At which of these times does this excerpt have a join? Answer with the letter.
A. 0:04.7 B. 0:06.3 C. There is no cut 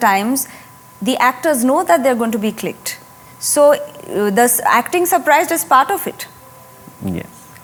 C